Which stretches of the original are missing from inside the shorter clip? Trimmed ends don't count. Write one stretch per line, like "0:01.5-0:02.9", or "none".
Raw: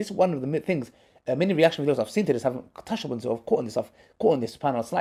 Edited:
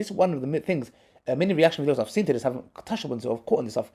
none